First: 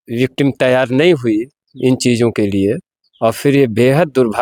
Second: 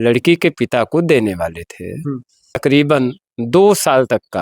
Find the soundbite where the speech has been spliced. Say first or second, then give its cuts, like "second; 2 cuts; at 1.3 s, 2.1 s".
second; 1 cut; at 2.6 s